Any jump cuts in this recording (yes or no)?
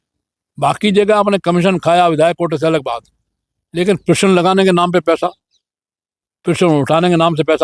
no